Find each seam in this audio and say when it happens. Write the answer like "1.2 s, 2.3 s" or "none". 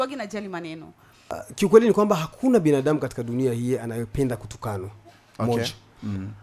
1.3 s